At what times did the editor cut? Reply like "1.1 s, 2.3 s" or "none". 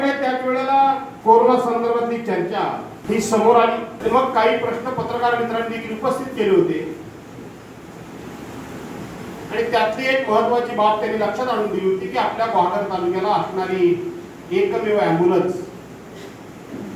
1.1 s, 2.9 s, 3.9 s

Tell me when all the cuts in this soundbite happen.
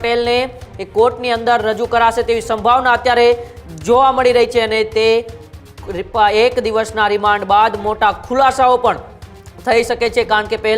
none

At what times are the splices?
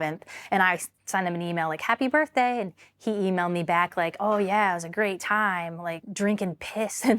6.0 s

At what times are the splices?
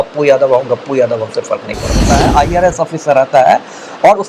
2.0 s

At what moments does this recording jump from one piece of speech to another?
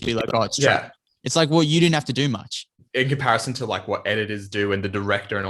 2.8 s

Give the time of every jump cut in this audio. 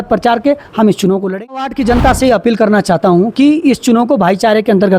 1.7 s

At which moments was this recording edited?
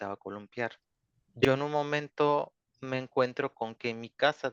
1.5 s

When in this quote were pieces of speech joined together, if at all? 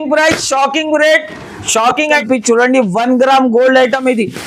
2.2 s

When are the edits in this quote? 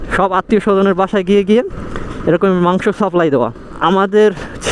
3.7 s

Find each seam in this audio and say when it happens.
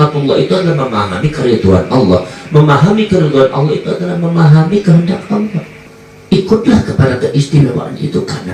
5.7 s

